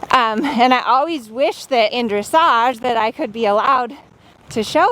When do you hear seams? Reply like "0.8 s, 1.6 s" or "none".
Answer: 1.9 s